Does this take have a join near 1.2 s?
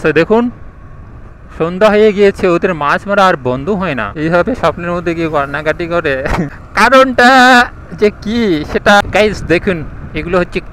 no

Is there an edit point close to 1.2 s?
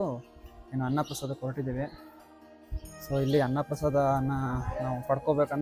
no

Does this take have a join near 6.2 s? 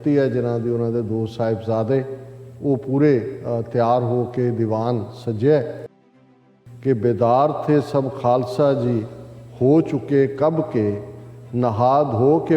yes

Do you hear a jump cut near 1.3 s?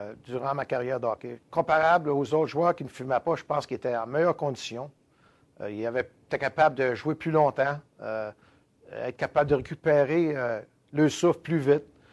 yes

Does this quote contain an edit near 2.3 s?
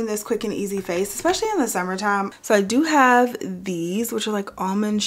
yes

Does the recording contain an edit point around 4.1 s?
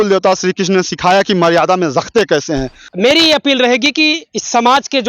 no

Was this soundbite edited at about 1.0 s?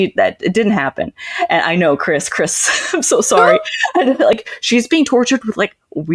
no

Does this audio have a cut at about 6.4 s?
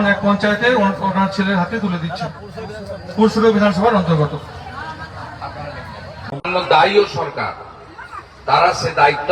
yes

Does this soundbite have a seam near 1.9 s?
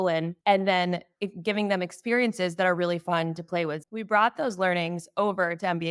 no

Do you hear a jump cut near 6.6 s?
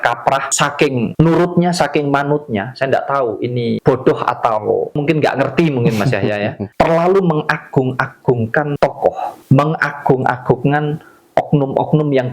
yes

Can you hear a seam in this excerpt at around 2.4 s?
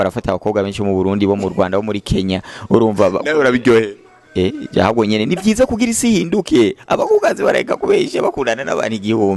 no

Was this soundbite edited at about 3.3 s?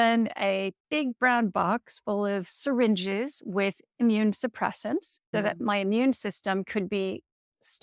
no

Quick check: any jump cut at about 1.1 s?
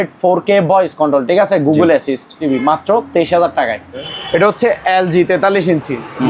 no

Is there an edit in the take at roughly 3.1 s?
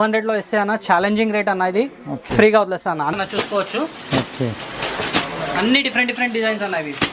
yes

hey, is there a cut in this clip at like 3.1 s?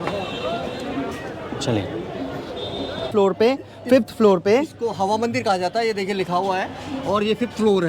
yes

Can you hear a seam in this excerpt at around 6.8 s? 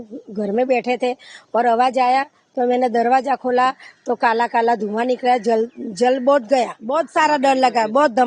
yes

